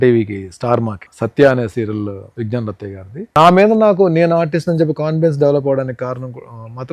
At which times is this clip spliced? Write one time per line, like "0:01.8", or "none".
0:02.2
0:03.3